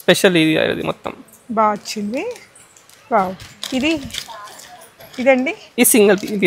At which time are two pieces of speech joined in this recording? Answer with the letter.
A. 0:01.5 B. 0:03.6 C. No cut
C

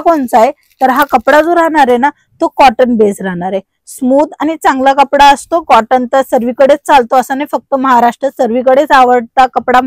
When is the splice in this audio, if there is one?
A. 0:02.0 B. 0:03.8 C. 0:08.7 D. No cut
D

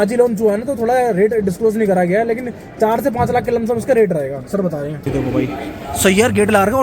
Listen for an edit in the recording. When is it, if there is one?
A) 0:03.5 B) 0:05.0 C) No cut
B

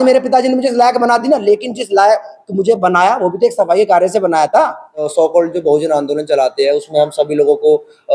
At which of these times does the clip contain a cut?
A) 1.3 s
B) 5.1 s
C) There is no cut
B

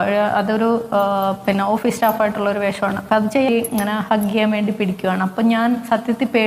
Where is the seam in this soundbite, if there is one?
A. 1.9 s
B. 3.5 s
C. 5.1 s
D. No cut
B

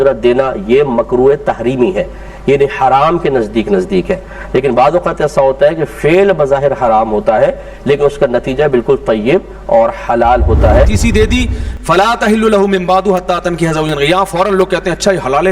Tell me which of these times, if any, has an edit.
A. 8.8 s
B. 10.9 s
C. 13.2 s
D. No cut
B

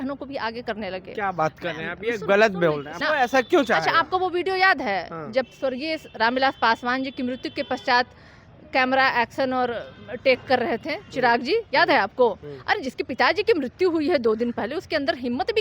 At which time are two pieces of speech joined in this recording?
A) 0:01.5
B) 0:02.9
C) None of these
B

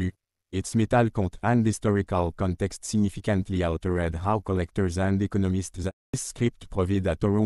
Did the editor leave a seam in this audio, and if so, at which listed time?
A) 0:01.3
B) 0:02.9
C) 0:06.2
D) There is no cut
C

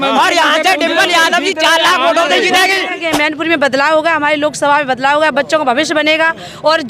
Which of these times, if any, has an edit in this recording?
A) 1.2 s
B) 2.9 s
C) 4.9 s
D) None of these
B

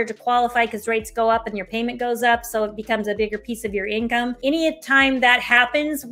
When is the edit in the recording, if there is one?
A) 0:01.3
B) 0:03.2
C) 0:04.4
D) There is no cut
C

